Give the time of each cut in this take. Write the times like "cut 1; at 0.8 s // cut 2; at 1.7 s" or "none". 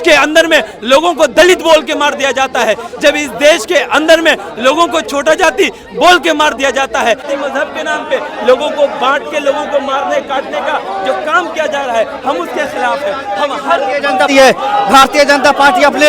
cut 1; at 7.2 s // cut 2; at 14.3 s